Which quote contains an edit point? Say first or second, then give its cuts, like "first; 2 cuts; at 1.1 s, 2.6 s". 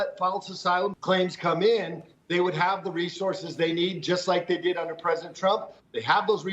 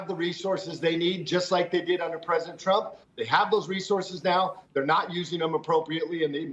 first; 1 cut; at 1.0 s